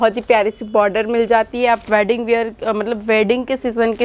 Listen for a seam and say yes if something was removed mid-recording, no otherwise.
no